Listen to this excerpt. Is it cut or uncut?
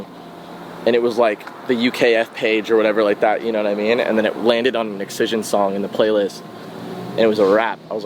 uncut